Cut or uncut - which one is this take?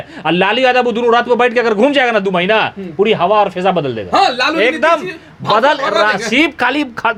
uncut